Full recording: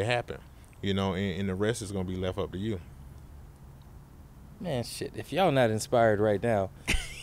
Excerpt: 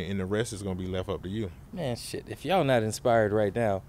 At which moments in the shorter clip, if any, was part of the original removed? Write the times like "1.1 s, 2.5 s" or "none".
1.6 s